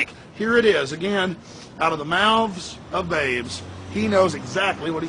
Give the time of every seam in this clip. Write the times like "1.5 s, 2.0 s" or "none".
1.6 s